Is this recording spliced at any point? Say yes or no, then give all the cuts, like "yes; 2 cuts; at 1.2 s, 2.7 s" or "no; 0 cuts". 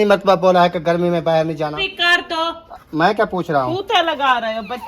yes; 1 cut; at 1.9 s